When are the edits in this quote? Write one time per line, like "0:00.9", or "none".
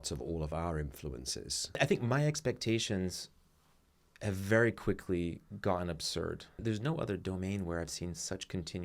0:01.7
0:06.6

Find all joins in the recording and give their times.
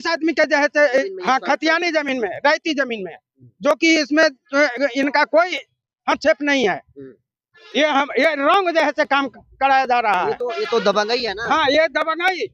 0:01.1

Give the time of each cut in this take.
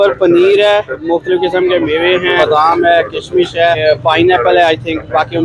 0:01.0
0:02.4
0:03.8

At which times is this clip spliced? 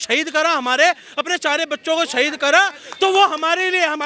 none

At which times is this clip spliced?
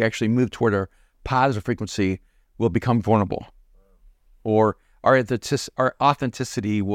none

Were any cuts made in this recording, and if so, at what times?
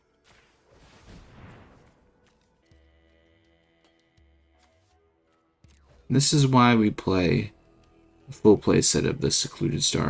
0:02.6

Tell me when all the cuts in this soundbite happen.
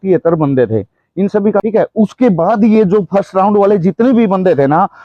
0:01.6

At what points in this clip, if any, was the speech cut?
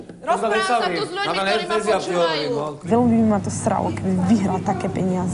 0:02.9

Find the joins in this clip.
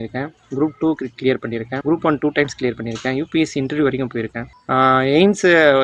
0:01.7
0:04.5

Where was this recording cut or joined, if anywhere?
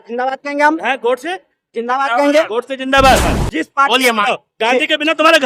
0:03.4

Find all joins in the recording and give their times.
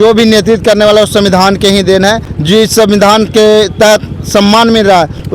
0:02.3

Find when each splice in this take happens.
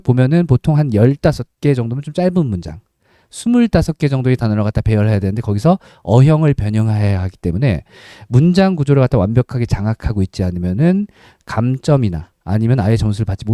none

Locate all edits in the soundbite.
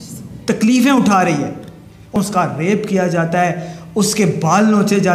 0:02.2

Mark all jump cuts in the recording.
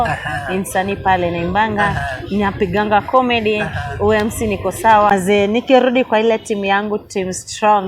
0:05.1

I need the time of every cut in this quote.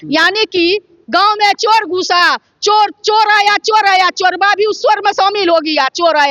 none

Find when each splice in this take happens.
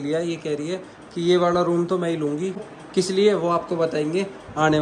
0:02.7

